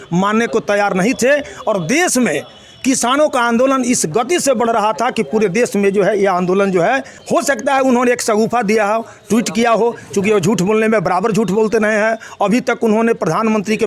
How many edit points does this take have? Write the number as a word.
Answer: one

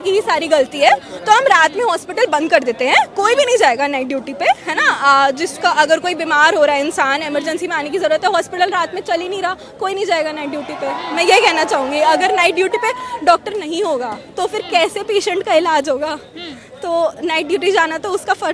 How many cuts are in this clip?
zero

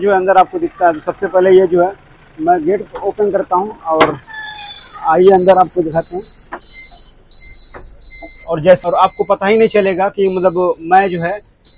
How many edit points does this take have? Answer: one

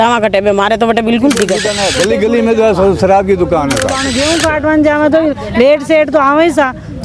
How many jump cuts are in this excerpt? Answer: two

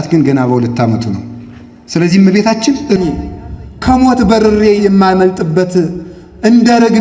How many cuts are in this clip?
one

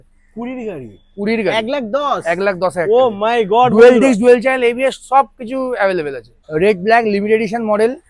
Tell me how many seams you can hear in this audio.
one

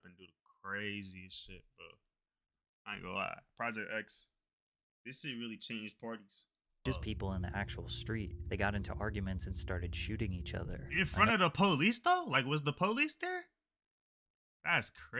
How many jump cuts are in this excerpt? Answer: one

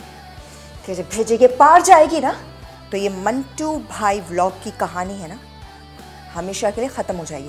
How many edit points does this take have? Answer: zero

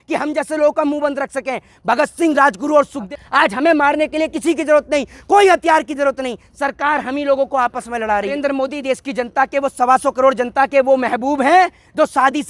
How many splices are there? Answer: two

